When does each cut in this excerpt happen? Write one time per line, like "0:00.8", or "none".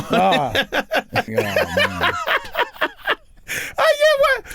0:01.3